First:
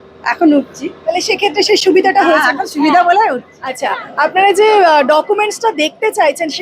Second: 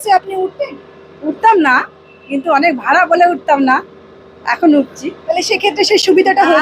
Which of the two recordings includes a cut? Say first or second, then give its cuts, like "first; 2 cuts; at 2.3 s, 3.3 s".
first; 1 cut; at 3.6 s